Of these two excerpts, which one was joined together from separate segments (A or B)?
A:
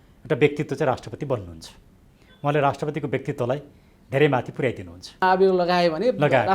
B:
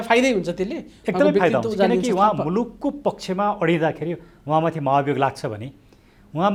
A